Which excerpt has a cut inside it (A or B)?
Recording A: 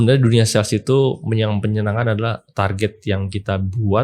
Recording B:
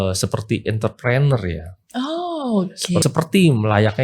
B